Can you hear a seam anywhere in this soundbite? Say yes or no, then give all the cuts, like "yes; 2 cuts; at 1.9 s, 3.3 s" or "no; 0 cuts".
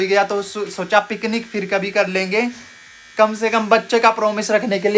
no; 0 cuts